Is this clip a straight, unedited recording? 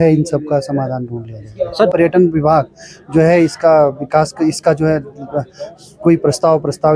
no; 1 cut; at 1.9 s

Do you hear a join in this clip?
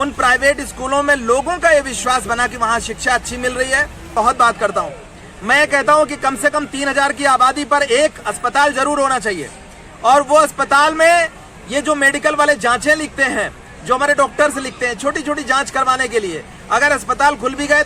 yes; 1 cut; at 4.1 s

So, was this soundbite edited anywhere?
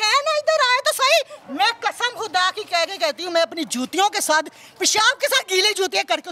no; 0 cuts

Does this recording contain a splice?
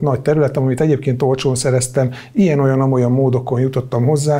no; 0 cuts

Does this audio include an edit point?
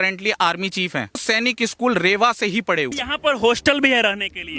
yes; 2 cuts; at 1.2 s, 3.0 s

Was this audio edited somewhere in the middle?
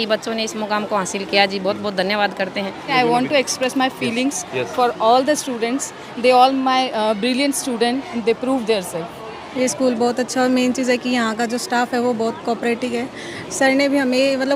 yes; 3 cuts; at 2.9 s, 8.1 s, 9.4 s

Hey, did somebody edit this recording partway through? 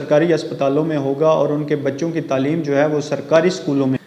no; 0 cuts

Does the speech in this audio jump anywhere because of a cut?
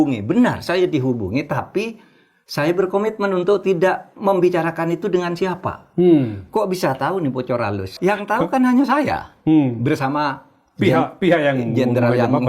yes; 1 cut; at 7.9 s

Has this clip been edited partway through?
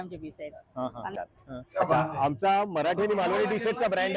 yes; 1 cut; at 1.1 s

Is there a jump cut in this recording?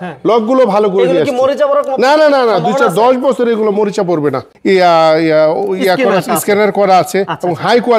yes; 1 cut; at 4.5 s

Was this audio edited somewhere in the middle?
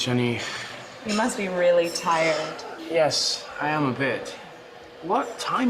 no; 0 cuts

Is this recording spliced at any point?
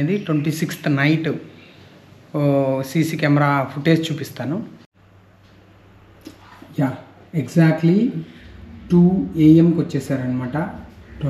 no; 0 cuts

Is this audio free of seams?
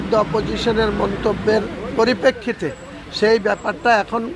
yes; 0 cuts

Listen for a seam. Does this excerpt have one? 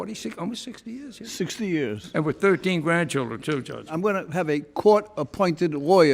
no; 0 cuts

